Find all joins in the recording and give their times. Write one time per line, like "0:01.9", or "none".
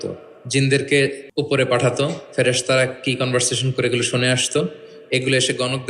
0:01.2